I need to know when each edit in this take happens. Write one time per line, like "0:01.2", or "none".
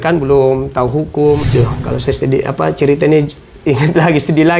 0:01.4

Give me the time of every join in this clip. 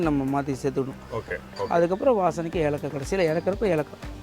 0:01.5

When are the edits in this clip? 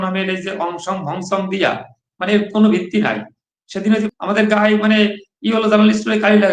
0:04.1

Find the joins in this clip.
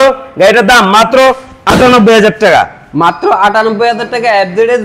none

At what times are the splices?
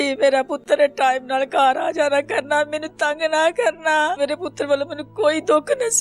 0:04.2

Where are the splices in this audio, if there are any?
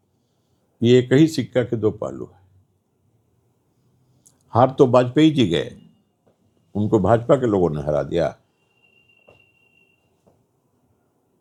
none

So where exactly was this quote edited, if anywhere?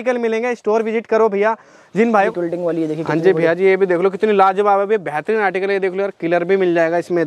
0:02.3

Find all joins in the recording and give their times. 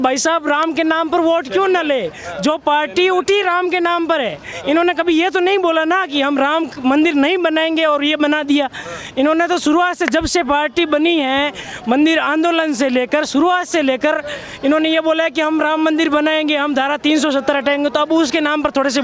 none

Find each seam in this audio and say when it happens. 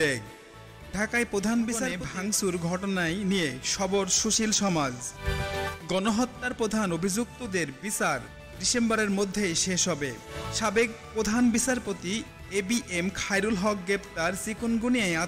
0:02.0
0:10.5

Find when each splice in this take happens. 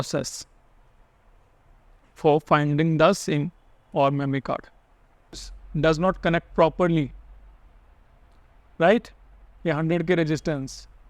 0:05.6

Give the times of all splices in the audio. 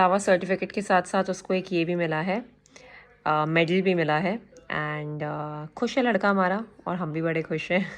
none

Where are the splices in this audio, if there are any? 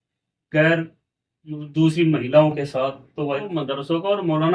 0:03.5

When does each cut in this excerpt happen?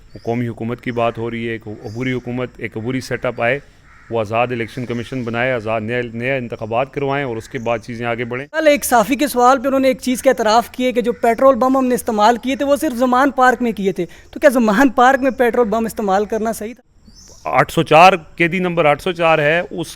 0:08.6
0:16.9

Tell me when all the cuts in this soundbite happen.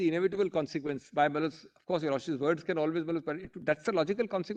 none

